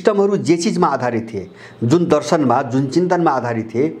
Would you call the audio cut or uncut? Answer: uncut